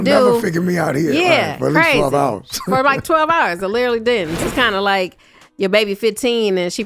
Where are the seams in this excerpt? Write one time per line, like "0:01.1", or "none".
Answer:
0:04.4